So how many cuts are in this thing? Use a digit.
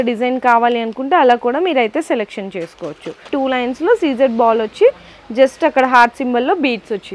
1